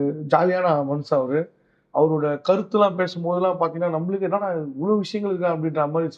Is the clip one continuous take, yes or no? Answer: yes